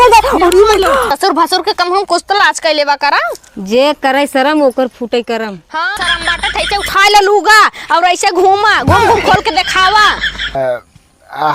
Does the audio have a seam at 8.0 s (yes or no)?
no